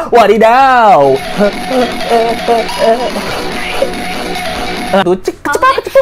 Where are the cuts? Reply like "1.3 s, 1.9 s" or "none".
5.0 s